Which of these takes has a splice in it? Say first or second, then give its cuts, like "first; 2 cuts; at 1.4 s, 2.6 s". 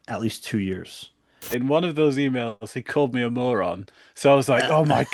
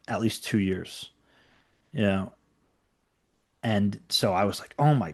first; 1 cut; at 1.5 s